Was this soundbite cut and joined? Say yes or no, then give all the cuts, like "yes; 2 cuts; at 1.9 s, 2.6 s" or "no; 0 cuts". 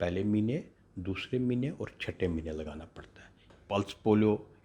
yes; 1 cut; at 3.5 s